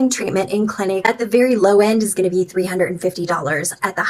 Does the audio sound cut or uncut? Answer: uncut